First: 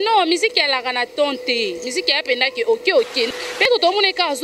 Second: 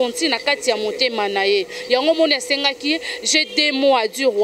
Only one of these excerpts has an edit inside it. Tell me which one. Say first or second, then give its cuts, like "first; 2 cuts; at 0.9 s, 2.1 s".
first; 1 cut; at 3.3 s